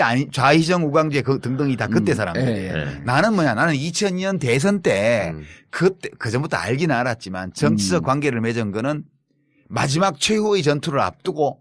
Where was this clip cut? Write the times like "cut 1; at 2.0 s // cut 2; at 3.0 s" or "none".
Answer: cut 1; at 3.0 s

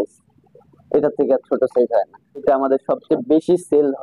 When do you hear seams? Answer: cut 1; at 2.4 s

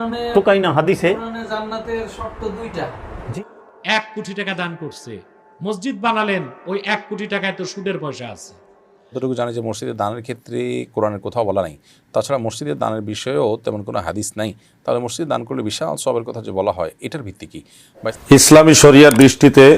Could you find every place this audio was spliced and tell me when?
cut 1; at 3.3 s // cut 2; at 9.2 s // cut 3; at 18.1 s

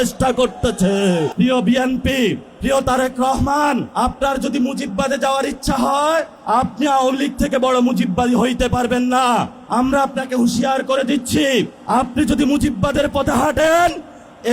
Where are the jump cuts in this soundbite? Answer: cut 1; at 1.3 s // cut 2; at 2.5 s // cut 3; at 3.9 s // cut 4; at 6.4 s // cut 5; at 9.6 s // cut 6; at 11.8 s

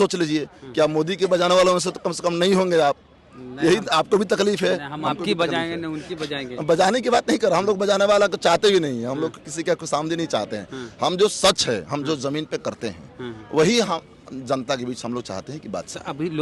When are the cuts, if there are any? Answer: none

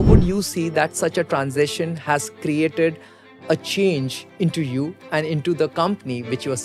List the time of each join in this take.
none

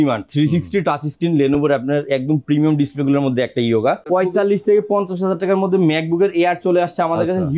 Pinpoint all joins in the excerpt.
cut 1; at 4.0 s

